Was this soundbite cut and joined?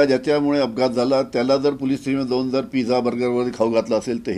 no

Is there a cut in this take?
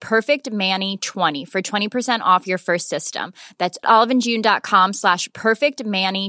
yes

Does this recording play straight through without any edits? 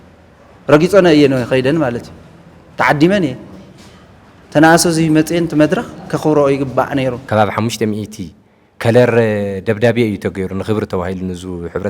no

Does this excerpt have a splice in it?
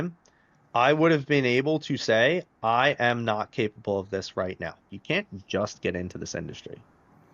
yes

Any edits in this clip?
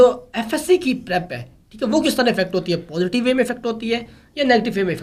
no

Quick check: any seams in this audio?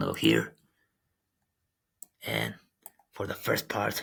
no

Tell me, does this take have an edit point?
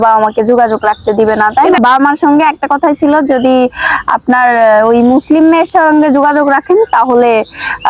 yes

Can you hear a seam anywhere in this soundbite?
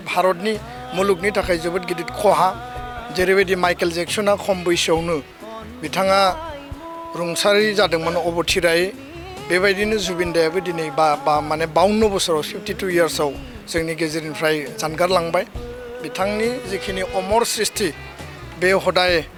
no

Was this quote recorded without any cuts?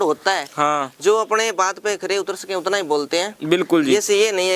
yes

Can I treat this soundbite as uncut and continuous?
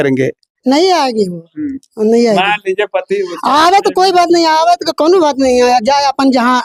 yes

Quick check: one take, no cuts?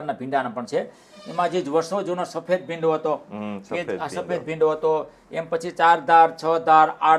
yes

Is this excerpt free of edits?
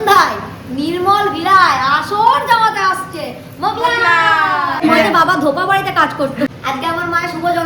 no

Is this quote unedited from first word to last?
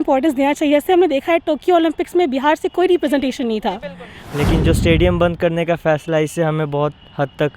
no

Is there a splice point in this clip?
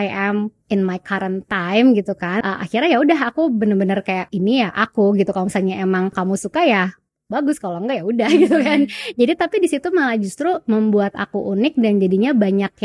yes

